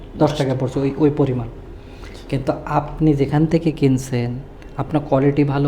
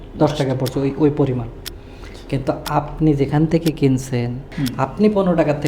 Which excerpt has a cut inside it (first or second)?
second